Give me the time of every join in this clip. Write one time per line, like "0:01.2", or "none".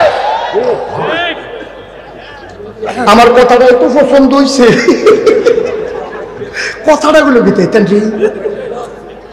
none